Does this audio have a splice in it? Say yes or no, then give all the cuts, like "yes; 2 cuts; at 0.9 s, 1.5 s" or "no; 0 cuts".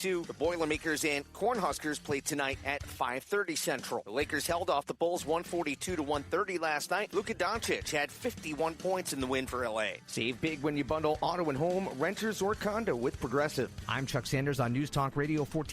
yes; 1 cut; at 10.0 s